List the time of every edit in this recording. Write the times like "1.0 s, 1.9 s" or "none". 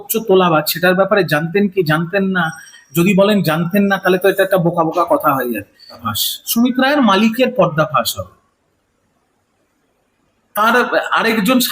6.0 s